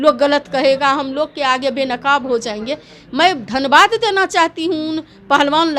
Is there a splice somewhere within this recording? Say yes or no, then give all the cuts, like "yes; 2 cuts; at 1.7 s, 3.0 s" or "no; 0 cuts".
no; 0 cuts